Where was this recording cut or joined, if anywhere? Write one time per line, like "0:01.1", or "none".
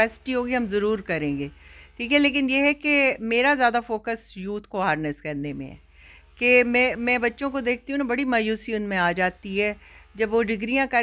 none